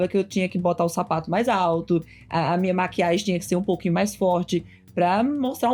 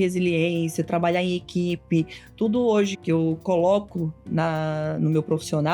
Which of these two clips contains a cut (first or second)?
second